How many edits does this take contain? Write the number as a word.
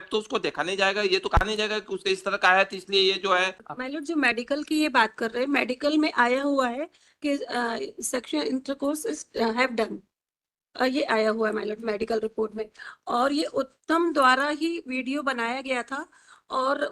one